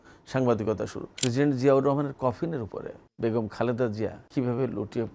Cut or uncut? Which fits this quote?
cut